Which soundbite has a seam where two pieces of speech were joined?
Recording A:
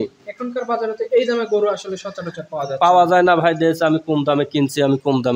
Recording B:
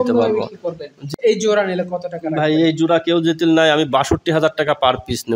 B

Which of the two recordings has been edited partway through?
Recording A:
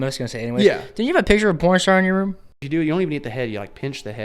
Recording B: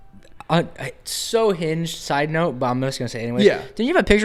A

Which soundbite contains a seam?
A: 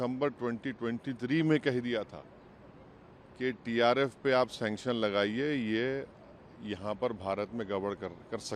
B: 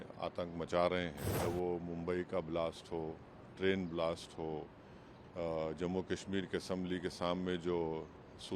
B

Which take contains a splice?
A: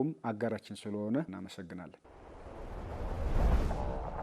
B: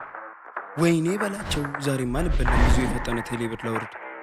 A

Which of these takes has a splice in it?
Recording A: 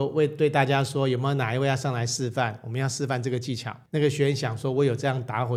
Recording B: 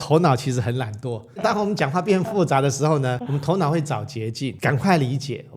B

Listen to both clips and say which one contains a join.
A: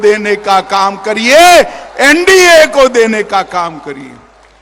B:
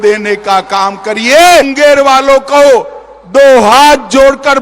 B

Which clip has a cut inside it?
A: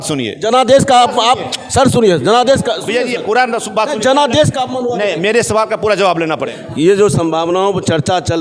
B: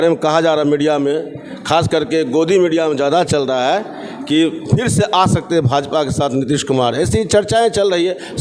A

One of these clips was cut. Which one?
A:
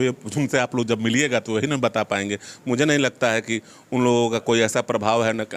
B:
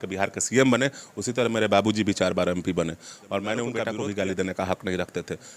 B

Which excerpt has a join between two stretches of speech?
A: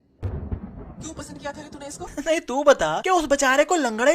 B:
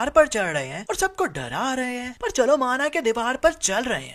A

